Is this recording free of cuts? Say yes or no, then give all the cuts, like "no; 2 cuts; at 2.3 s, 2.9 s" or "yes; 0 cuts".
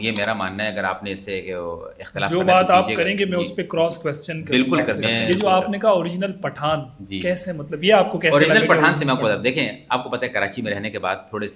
no; 1 cut; at 5.0 s